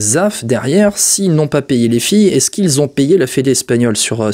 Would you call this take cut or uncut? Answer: uncut